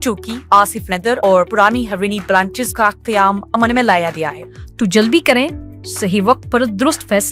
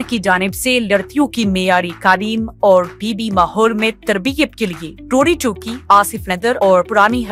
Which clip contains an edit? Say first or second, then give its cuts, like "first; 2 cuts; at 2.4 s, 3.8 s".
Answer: first; 1 cut; at 4.4 s